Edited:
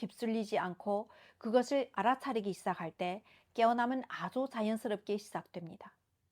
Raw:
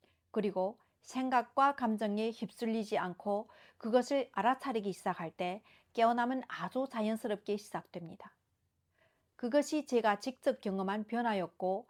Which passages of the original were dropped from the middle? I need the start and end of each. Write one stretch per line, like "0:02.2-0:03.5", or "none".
none